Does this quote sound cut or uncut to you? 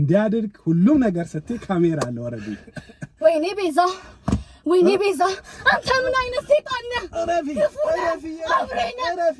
uncut